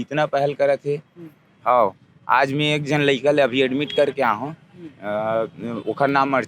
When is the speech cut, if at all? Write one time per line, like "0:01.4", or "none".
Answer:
0:01.5